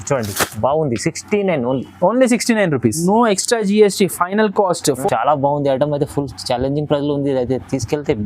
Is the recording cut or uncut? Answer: cut